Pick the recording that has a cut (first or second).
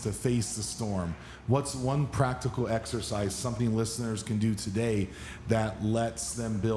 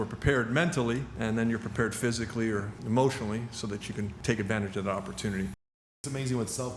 second